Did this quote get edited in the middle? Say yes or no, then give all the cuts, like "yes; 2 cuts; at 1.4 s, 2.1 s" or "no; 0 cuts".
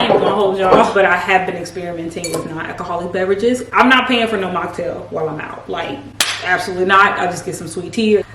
no; 0 cuts